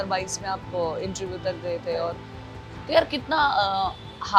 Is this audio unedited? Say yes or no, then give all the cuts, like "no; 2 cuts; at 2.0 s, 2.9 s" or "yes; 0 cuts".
yes; 0 cuts